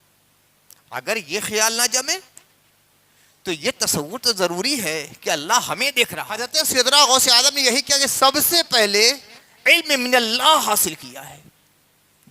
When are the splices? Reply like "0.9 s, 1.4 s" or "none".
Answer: 6.5 s